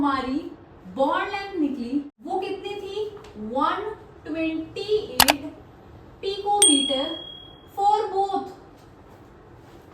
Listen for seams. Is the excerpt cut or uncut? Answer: cut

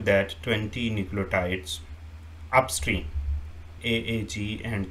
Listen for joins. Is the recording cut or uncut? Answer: cut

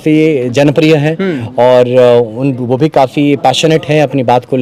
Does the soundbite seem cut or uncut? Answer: uncut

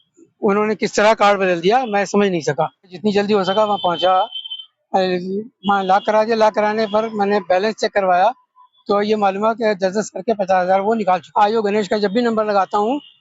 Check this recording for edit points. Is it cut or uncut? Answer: cut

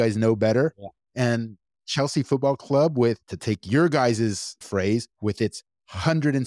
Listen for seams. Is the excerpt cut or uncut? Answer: uncut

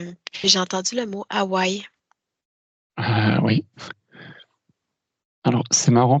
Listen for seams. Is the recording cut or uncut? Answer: uncut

